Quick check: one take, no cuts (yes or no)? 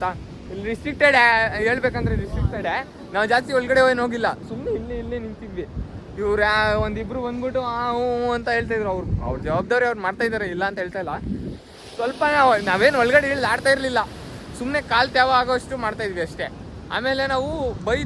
yes